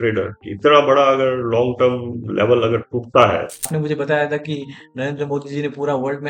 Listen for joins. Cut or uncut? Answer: cut